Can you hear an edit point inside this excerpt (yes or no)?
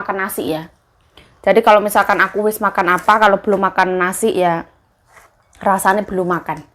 no